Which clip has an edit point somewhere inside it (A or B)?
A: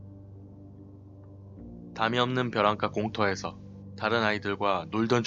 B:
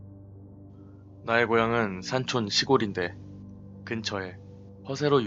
B